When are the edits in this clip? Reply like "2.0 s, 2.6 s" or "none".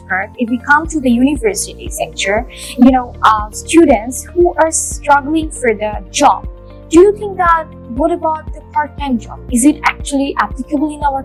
none